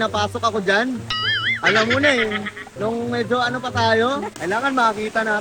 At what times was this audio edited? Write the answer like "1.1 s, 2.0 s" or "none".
4.3 s